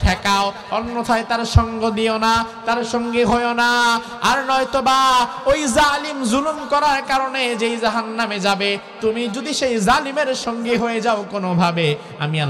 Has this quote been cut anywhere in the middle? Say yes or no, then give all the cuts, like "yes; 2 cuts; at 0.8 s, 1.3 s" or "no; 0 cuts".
no; 0 cuts